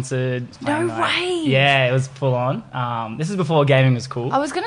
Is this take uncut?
yes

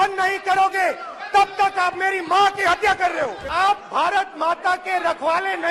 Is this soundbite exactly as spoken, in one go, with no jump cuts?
no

